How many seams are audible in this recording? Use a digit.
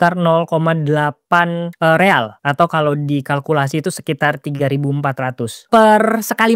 3